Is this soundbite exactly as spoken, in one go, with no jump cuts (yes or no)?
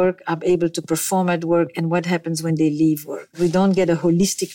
no